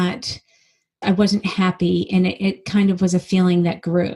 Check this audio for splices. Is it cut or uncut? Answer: cut